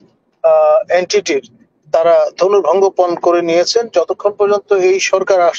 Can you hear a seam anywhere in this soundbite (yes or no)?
no